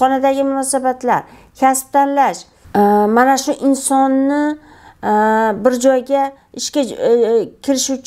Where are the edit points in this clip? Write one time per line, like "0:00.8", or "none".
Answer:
0:02.5